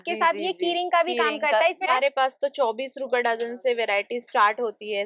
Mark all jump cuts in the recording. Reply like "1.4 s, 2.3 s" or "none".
1.8 s